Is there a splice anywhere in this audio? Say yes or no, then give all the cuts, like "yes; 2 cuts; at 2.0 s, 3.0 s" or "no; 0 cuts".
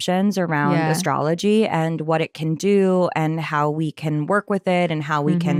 no; 0 cuts